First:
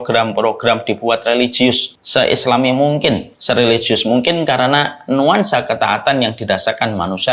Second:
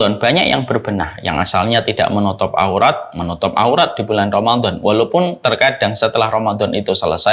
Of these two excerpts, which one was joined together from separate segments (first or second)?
first